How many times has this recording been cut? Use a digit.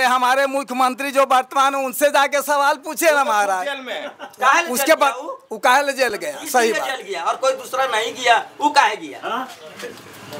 0